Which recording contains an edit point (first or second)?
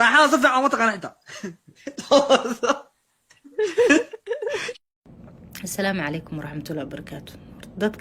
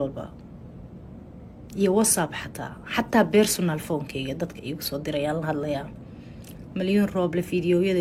first